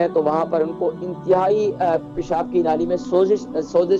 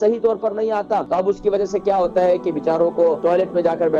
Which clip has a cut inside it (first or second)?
second